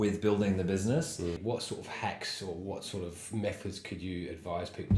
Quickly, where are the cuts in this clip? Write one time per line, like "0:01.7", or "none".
0:01.4